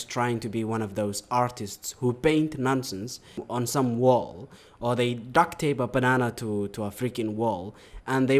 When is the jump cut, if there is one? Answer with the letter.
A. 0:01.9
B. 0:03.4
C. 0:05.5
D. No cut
B